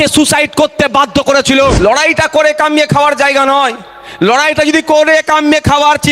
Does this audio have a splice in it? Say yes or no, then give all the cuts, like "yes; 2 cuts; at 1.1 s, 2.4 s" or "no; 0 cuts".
yes; 1 cut; at 1.8 s